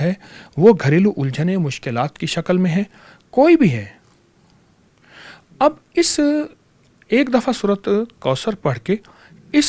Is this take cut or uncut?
uncut